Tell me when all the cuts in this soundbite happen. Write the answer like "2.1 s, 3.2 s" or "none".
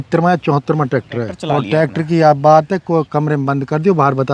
1.4 s